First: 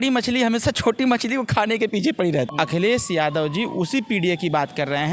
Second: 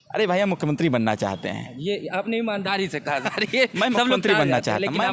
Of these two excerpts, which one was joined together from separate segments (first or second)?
first